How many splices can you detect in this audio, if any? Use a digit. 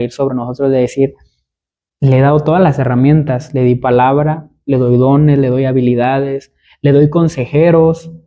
0